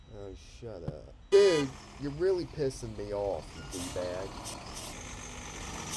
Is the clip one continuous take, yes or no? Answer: no